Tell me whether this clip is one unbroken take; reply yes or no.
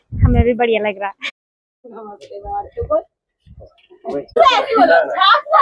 no